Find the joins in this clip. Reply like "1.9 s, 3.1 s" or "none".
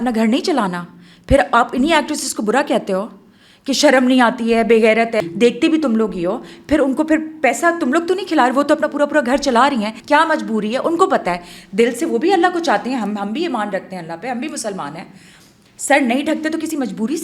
5.2 s, 9.9 s